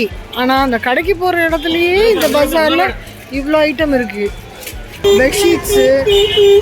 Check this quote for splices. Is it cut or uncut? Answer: cut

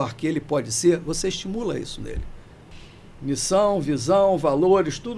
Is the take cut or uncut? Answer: cut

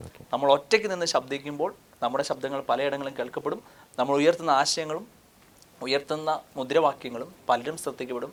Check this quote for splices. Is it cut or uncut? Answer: uncut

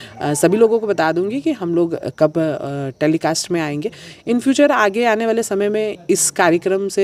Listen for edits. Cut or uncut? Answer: uncut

